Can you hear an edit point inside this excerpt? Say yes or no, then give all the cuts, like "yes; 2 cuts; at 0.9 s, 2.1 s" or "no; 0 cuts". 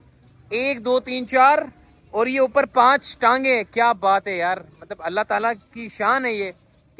no; 0 cuts